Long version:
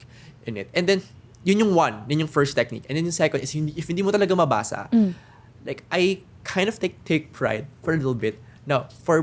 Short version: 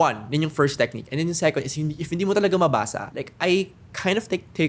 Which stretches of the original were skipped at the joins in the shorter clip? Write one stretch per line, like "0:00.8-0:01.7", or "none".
0:04.8-0:05.5